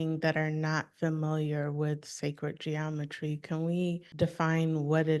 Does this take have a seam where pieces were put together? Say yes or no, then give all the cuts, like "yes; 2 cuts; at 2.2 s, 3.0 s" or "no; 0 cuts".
yes; 1 cut; at 4.1 s